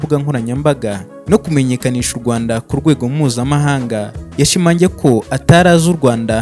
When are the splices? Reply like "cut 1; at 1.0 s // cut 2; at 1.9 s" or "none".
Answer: cut 1; at 4.2 s